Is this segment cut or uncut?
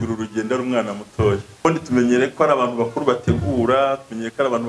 cut